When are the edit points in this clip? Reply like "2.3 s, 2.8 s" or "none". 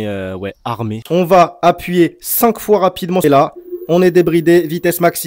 1.0 s, 3.2 s